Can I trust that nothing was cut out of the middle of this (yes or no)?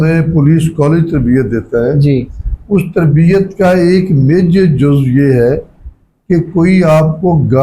yes